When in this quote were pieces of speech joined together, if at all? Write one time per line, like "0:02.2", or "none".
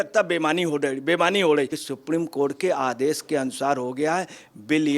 0:01.8